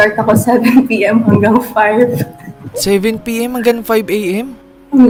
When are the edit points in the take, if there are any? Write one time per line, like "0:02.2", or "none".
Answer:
none